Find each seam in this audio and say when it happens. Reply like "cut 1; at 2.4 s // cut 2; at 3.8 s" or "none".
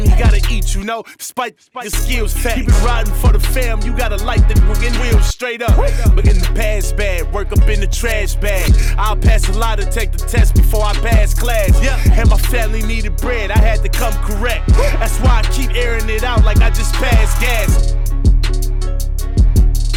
none